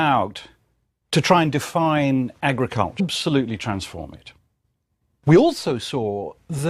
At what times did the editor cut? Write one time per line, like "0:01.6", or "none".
none